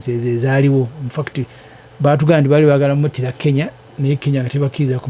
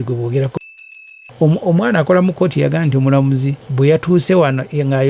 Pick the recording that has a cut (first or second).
second